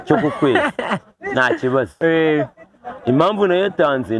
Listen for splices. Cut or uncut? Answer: uncut